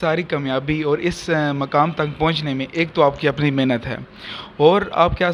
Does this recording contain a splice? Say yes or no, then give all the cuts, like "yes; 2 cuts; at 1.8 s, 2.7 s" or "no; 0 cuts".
no; 0 cuts